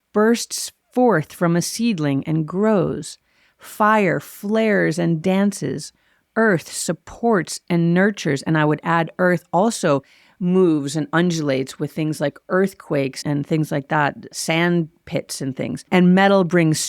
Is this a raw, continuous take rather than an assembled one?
no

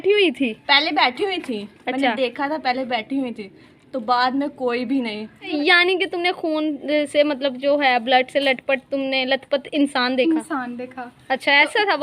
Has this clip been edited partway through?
yes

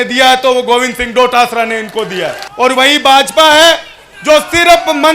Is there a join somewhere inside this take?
yes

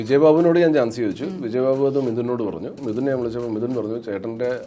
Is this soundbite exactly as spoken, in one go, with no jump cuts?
no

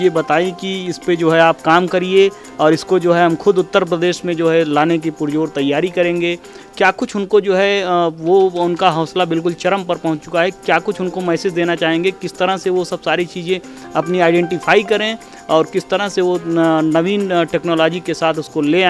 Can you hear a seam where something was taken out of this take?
no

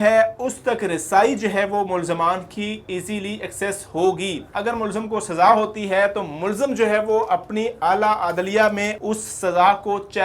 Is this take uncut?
no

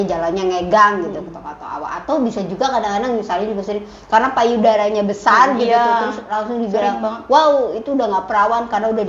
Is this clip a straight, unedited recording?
yes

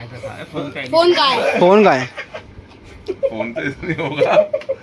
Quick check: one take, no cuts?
yes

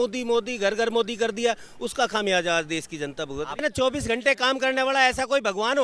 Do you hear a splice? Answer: yes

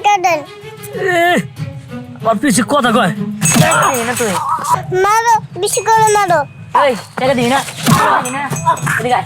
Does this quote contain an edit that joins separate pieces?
yes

